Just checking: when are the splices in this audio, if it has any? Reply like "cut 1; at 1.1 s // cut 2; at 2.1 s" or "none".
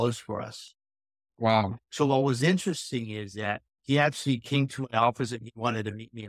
cut 1; at 1.8 s // cut 2; at 3.7 s